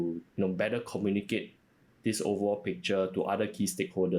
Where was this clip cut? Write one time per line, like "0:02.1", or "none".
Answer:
none